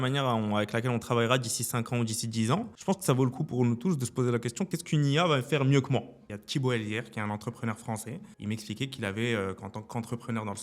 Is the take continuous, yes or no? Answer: no